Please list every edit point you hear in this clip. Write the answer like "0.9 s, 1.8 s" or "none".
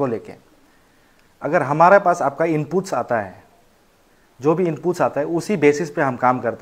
none